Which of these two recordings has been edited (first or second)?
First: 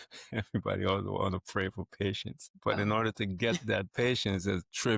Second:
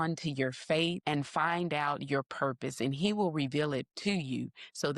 second